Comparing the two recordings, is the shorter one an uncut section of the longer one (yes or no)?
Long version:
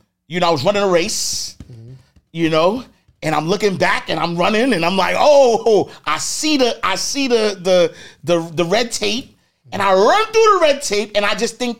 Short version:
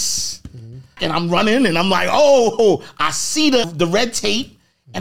no